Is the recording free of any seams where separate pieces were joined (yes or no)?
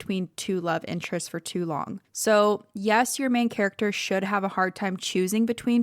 no